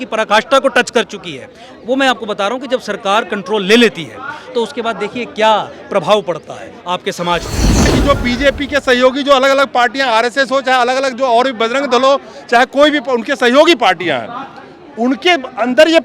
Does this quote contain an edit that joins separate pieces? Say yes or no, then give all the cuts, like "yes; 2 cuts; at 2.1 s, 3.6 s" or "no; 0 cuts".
yes; 1 cut; at 7.9 s